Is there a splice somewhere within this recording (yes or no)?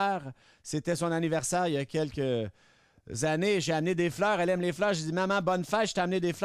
no